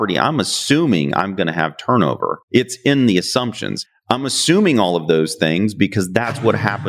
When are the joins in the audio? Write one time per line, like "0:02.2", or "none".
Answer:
none